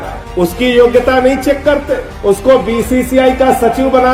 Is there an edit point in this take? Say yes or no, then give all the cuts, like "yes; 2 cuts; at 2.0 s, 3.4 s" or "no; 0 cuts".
no; 0 cuts